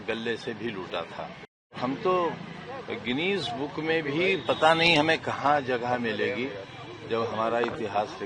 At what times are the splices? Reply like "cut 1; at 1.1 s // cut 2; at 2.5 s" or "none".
cut 1; at 1.8 s